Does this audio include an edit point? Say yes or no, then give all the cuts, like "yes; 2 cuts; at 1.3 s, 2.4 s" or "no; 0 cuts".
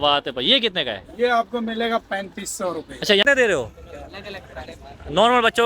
yes; 1 cut; at 3.2 s